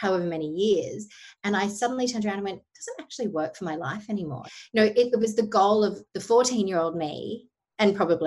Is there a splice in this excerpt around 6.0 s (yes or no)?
no